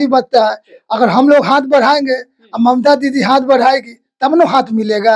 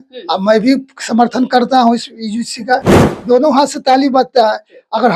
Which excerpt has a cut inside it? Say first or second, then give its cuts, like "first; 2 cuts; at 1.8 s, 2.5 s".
second; 1 cut; at 3.0 s